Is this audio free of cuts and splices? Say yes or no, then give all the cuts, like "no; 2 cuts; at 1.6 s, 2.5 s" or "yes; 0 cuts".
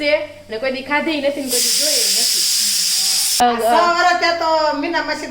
no; 1 cut; at 3.4 s